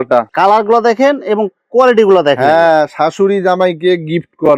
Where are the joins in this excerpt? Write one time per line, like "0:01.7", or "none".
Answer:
none